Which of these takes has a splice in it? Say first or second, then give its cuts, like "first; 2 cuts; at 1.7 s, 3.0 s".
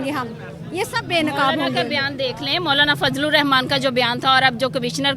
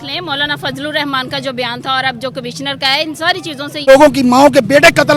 second; 1 cut; at 3.8 s